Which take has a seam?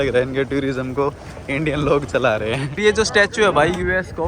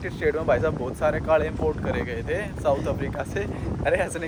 first; 1 cut; at 2.8 s

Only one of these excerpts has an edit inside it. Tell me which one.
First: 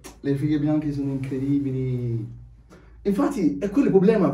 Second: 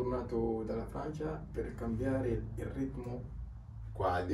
first; 1 cut; at 2.8 s

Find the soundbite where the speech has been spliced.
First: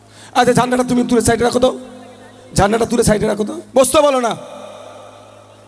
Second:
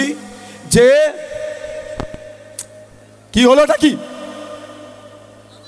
first; 1 cut; at 3.6 s

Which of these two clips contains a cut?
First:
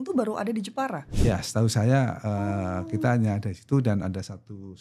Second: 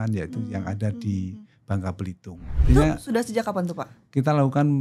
second; 1 cut; at 2.6 s

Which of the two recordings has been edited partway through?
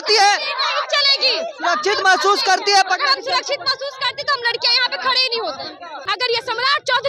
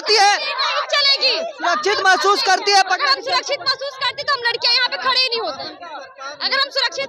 first; 1 cut; at 6.0 s

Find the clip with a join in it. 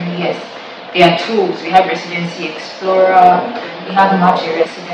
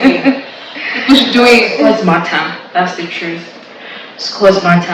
second; 1 cut; at 1.8 s

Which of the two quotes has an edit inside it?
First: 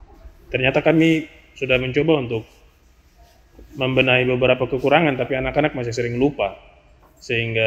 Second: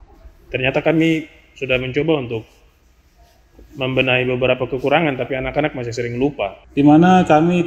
second; 1 cut; at 6.6 s

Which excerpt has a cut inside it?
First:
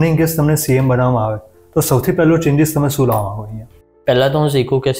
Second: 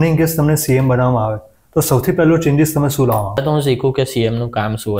second; 1 cut; at 3.4 s

